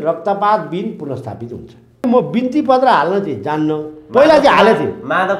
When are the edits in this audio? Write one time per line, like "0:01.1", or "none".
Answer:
0:02.0